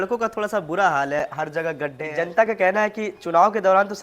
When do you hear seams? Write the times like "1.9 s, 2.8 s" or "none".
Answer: 2.0 s